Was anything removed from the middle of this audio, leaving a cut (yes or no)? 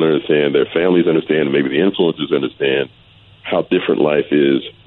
no